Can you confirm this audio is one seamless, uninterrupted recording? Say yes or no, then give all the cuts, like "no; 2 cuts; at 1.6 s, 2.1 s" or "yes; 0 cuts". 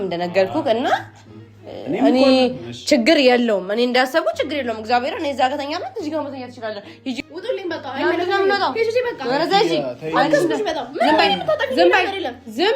no; 1 cut; at 7.2 s